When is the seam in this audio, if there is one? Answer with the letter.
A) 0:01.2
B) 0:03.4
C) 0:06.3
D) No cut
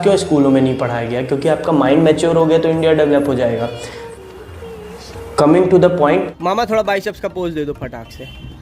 C